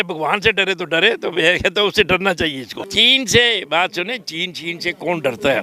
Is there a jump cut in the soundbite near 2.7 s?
yes; 1 cut; at 2.7 s

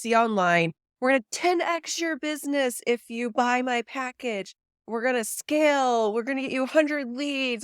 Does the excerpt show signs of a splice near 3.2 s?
no; 1 cut; at 4.8 s

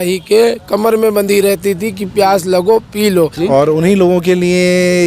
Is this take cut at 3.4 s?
yes; 1 cut; at 3.4 s

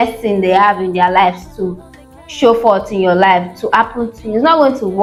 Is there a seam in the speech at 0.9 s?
no; 0 cuts

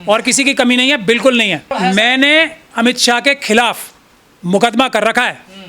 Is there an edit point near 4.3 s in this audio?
no; 1 cut; at 1.7 s

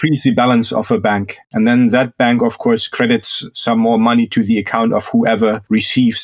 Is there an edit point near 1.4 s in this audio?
yes; 1 cut; at 1.4 s

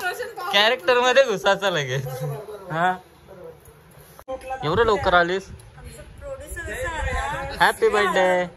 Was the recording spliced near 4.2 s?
yes; 1 cut; at 4.2 s

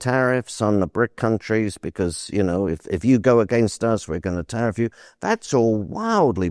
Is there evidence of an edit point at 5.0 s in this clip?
no; 0 cuts

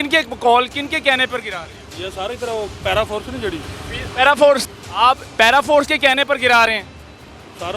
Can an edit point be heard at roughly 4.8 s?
yes; 1 cut; at 4.8 s

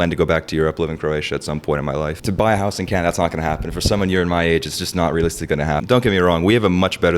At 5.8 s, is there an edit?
yes; 2 cuts; at 2.2 s, 5.8 s

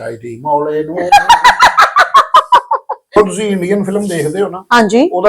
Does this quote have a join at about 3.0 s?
yes; 1 cut; at 3.0 s

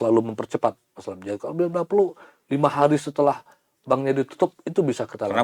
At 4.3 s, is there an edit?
no; 0 cuts

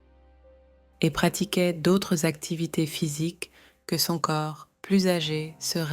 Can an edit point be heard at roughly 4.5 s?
no; 1 cut; at 0.9 s

